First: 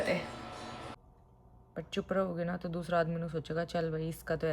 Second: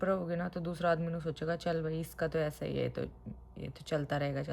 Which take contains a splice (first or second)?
first